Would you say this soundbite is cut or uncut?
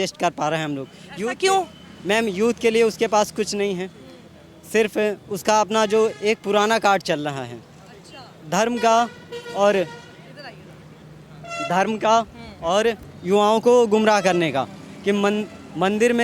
uncut